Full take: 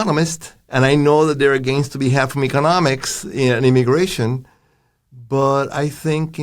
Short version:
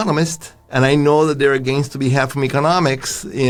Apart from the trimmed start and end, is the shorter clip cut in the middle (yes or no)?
no